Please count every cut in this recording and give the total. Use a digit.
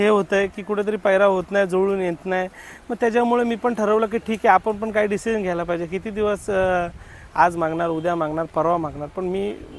0